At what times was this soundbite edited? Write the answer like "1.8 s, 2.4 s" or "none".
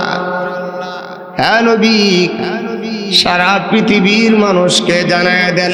none